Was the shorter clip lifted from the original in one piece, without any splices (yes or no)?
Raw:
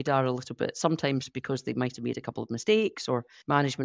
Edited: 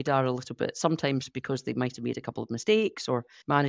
yes